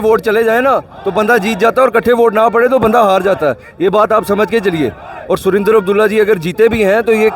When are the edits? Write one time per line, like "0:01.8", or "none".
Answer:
none